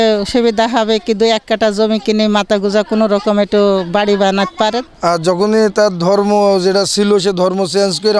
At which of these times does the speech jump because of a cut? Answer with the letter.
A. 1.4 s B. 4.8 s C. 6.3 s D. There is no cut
B